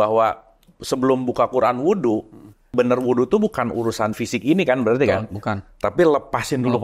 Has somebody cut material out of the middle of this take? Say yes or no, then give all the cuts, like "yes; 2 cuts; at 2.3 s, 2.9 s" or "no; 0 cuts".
yes; 1 cut; at 2.7 s